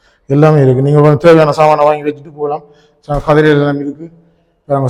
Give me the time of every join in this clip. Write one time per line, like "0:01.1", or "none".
none